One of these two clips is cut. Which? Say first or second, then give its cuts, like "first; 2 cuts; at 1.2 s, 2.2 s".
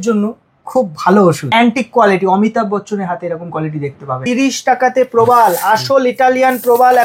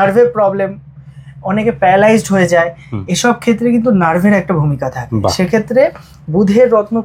first; 2 cuts; at 1.5 s, 4.2 s